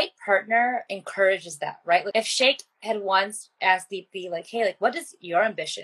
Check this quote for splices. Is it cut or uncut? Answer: cut